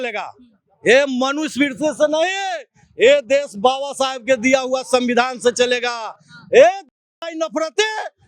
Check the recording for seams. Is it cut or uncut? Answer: uncut